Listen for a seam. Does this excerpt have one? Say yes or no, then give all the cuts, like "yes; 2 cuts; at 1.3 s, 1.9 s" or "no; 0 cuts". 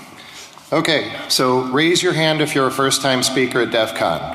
yes; 1 cut; at 1.5 s